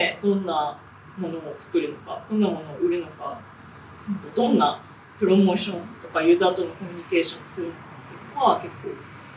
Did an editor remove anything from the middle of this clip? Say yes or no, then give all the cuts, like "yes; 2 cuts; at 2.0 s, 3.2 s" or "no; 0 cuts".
no; 0 cuts